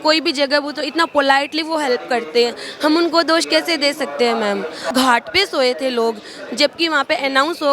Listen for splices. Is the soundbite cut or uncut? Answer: cut